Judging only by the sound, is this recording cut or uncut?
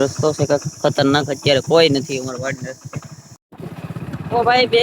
uncut